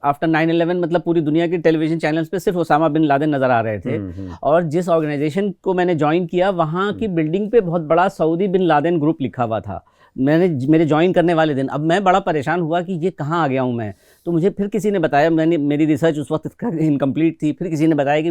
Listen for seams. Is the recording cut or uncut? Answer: uncut